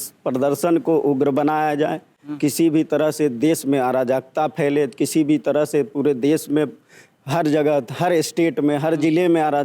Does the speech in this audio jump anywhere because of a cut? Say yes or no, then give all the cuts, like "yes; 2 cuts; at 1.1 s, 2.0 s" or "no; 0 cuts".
no; 0 cuts